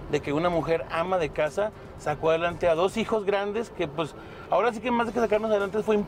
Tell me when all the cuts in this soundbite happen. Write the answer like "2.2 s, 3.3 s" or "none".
none